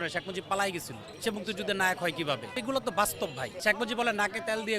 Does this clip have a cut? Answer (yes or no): yes